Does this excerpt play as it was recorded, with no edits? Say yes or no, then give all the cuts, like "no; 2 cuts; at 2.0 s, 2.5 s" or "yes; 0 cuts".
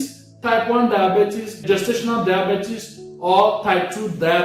no; 1 cut; at 1.6 s